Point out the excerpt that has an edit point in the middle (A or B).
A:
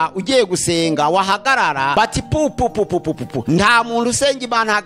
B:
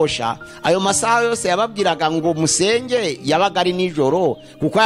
A